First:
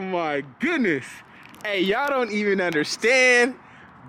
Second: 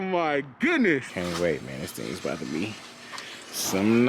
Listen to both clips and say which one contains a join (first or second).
second